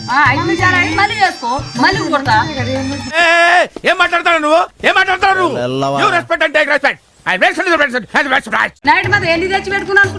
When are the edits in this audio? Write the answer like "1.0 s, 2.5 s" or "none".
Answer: 8.8 s